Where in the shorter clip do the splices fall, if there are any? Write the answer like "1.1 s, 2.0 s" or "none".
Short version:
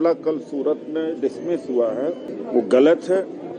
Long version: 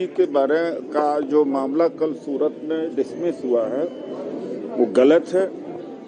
2.3 s